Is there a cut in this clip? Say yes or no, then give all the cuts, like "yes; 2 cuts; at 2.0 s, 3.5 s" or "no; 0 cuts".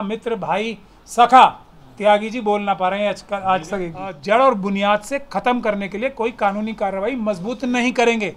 yes; 1 cut; at 4.1 s